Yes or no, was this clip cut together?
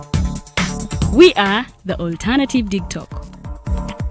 yes